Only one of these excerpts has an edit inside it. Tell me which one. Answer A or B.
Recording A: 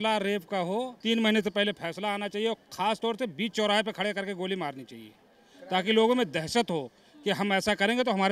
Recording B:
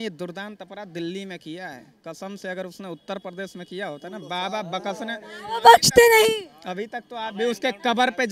A